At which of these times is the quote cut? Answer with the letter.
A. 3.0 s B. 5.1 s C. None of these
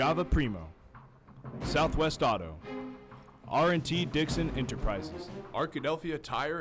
B